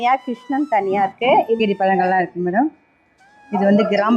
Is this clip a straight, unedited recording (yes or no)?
no